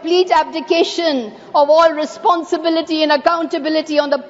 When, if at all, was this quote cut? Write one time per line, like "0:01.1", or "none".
none